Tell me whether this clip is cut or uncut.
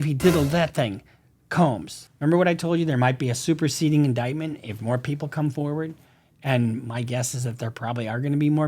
cut